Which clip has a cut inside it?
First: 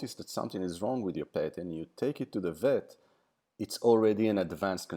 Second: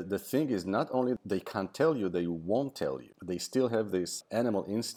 second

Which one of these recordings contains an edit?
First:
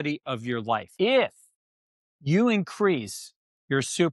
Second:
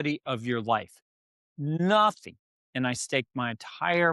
first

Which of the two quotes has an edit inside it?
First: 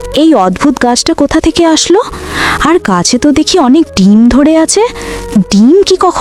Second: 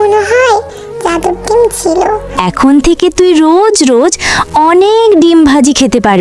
second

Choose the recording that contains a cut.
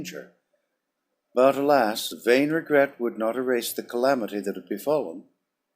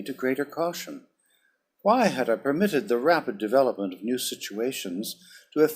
first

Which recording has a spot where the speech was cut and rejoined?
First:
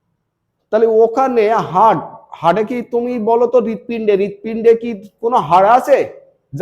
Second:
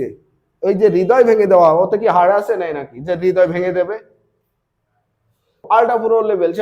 second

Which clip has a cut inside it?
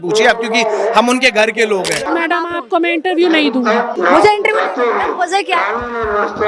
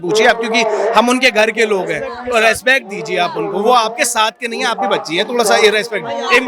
first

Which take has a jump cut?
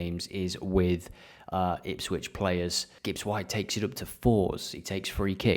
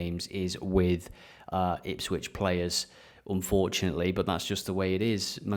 first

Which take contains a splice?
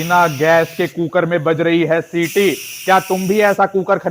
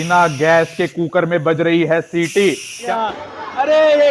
second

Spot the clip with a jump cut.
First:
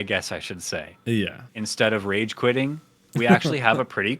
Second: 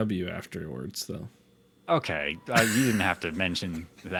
first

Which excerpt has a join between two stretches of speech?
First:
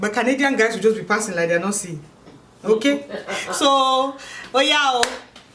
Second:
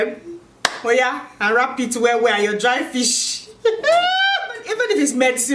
second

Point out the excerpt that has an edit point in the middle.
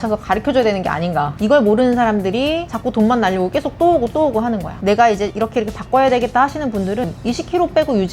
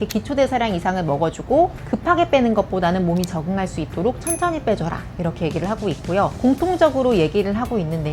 first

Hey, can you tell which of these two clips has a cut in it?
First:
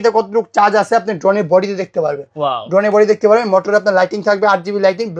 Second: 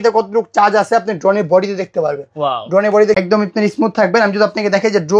second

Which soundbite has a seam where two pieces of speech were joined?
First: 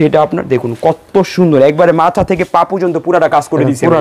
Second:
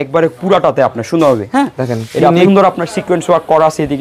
second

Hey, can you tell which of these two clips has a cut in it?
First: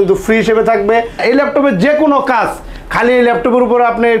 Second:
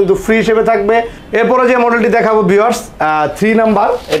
first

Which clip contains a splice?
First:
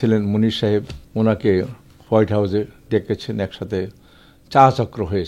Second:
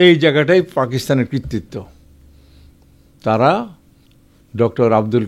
first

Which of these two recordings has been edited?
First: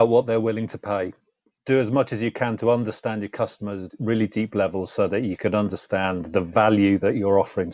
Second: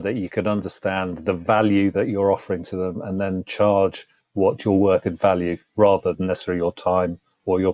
first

